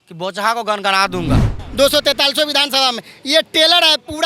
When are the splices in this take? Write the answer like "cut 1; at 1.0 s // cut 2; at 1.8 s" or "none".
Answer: cut 1; at 1.6 s